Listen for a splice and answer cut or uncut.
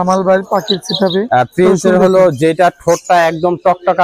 cut